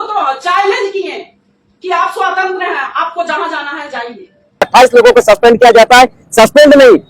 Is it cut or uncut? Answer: cut